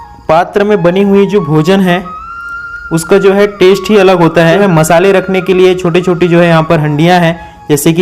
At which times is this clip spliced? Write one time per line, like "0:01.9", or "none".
0:04.6